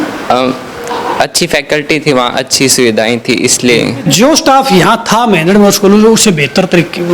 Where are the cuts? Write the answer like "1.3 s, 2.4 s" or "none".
4.0 s

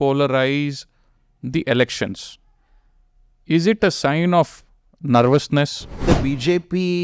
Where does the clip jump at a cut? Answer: 6.0 s

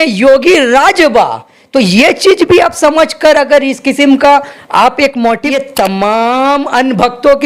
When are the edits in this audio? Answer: 5.4 s

